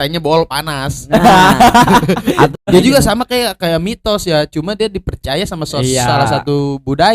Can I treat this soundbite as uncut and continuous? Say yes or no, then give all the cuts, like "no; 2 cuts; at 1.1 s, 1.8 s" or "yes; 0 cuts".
no; 1 cut; at 2.5 s